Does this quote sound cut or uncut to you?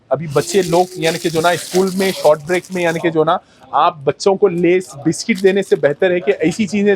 uncut